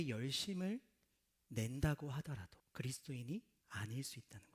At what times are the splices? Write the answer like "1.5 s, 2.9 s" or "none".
2.6 s, 3.6 s